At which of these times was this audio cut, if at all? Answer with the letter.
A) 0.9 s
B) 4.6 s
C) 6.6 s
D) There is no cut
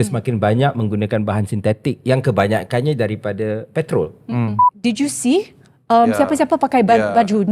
B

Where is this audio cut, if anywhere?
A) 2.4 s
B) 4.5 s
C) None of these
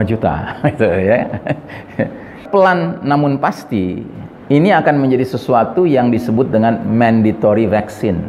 A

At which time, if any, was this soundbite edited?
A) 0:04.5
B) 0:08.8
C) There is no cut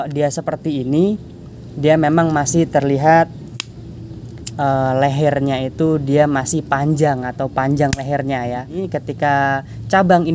B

